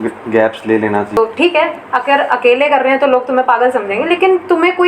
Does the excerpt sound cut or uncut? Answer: cut